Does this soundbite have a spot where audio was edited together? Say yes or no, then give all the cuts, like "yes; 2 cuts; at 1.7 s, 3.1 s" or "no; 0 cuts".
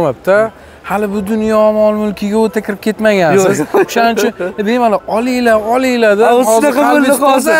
no; 0 cuts